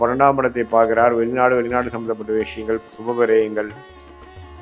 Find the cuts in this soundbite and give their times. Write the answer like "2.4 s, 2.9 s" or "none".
none